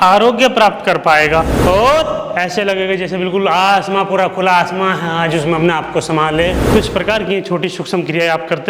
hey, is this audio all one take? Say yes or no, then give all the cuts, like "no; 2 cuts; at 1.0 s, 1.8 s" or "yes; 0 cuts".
no; 2 cuts; at 1.5 s, 6.6 s